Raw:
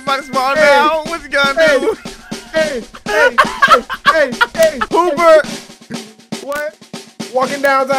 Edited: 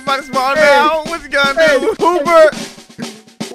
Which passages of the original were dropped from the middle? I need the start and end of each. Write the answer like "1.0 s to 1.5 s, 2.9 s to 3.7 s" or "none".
2.0 s to 4.9 s

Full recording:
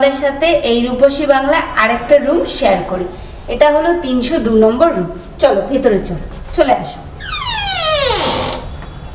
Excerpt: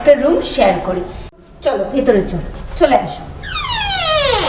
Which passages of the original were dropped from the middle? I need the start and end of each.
3.4 s to 5.1 s

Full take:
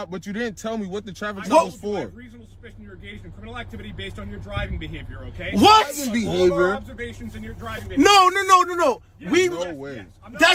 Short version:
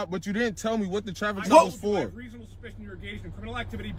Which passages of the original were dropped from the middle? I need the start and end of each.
none

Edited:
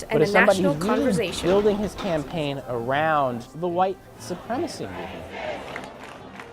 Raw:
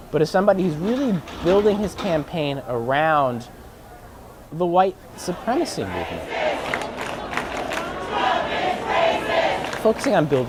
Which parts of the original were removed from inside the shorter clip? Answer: 3.5 s to 4.4 s

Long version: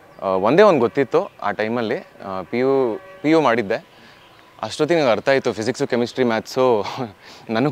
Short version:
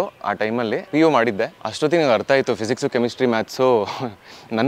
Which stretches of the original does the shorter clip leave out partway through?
2.0 s to 3.1 s, 3.9 s to 4.6 s

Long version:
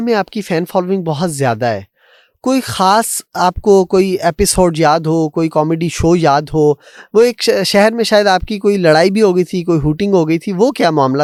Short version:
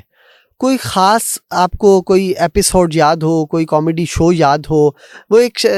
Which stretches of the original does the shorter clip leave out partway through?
none

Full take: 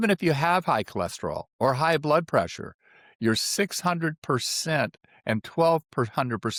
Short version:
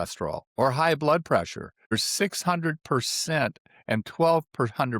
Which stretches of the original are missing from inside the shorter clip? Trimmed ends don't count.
3.0 s to 3.3 s

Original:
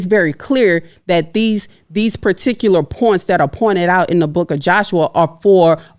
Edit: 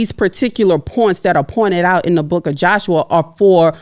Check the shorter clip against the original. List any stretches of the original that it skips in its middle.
none

